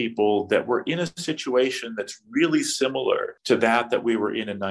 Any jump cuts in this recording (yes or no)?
yes